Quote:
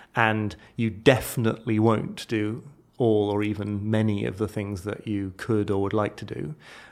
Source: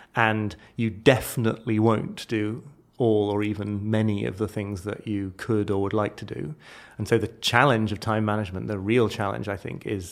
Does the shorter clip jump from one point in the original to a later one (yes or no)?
no